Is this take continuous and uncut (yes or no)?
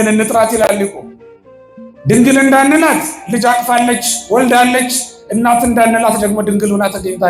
yes